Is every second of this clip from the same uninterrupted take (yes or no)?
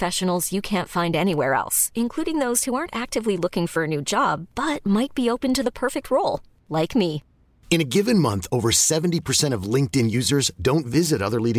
yes